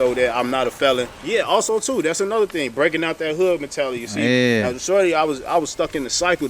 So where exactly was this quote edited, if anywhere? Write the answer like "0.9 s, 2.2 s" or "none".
1.2 s